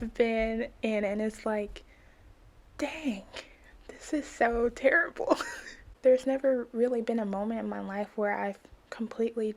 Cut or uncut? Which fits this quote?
uncut